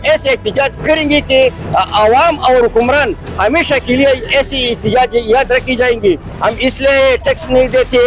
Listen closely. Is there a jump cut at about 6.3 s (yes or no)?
yes